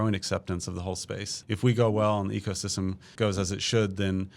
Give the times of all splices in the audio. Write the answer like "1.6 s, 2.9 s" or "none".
1.3 s, 3.1 s